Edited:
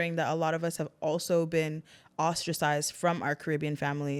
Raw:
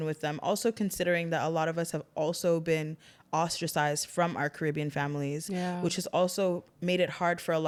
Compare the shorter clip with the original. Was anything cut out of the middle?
no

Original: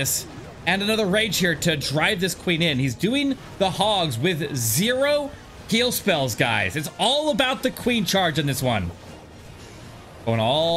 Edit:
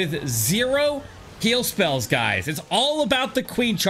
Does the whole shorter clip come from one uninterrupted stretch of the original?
yes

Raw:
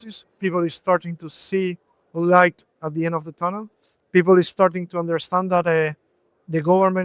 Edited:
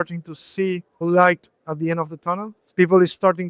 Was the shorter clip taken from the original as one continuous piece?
no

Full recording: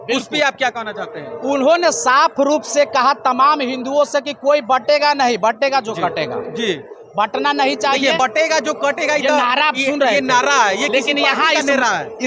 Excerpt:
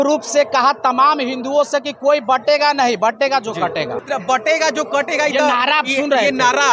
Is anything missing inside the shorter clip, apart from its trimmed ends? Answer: yes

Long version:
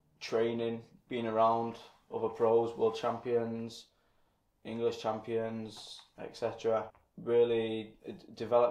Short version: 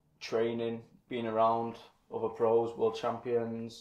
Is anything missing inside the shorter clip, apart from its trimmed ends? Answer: no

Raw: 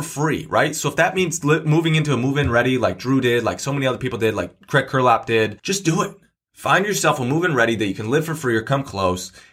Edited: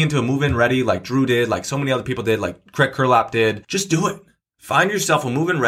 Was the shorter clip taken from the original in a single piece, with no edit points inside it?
yes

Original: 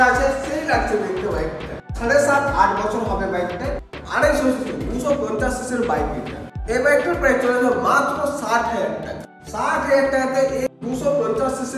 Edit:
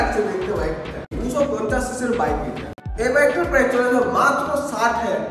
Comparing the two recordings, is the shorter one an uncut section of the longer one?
no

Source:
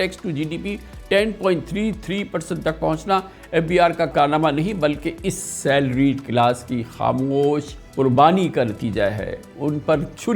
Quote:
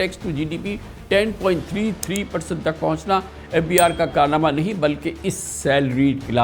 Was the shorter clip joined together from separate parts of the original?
no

